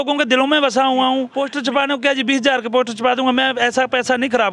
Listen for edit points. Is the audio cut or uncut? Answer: cut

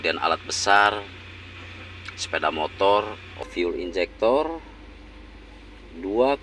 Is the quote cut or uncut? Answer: cut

